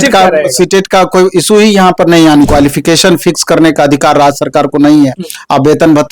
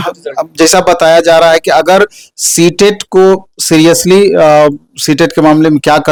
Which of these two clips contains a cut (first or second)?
first